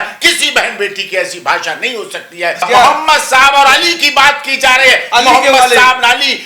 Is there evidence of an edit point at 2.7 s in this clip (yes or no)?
yes